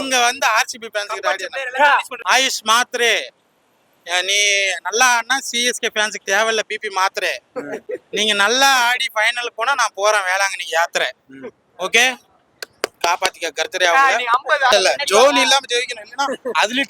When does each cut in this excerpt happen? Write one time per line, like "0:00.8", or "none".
0:02.3
0:14.7

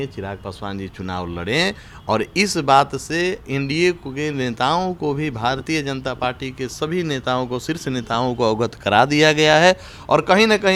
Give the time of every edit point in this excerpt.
none

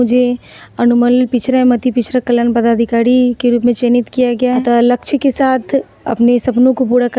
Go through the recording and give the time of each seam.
0:04.6

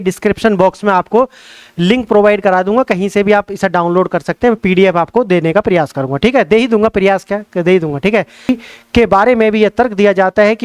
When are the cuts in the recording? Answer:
0:08.5

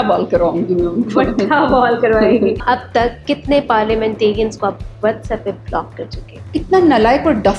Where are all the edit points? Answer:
0:02.6
0:06.6

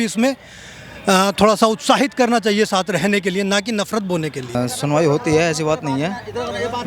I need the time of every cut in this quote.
0:04.5

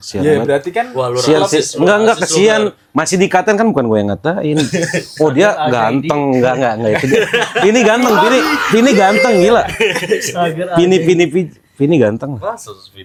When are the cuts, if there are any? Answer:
none

